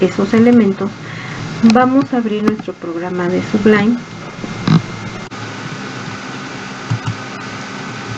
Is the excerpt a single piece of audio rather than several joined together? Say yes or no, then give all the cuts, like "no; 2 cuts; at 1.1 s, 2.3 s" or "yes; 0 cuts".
no; 1 cut; at 5.3 s